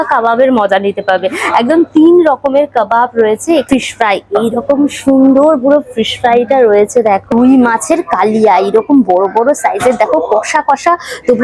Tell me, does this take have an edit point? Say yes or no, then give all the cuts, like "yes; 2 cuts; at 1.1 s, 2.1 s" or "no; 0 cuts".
yes; 2 cuts; at 3.6 s, 7.3 s